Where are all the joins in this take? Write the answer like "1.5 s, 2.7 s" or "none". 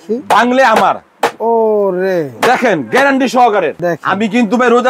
none